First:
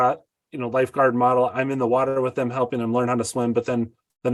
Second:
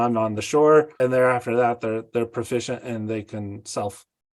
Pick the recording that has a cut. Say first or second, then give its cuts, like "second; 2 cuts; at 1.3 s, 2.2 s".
second; 1 cut; at 0.9 s